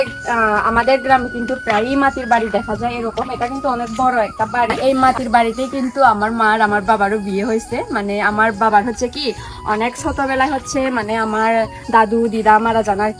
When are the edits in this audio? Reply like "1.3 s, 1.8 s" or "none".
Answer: 4.8 s